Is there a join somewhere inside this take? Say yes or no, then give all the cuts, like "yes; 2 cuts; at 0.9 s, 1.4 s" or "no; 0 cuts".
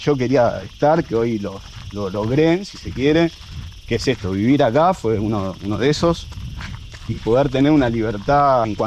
no; 0 cuts